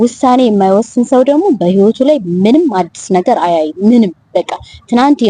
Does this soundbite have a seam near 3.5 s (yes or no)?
no